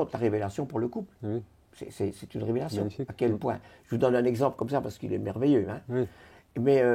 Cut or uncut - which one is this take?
uncut